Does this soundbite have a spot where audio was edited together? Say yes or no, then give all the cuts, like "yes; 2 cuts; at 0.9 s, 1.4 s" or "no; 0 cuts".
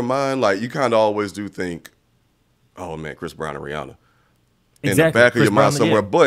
no; 0 cuts